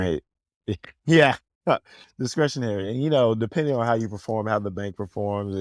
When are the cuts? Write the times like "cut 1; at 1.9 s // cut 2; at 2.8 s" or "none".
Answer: none